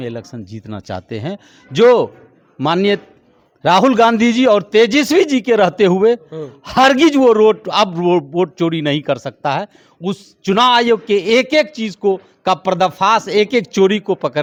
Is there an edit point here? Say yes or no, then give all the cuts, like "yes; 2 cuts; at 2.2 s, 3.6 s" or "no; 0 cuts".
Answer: no; 0 cuts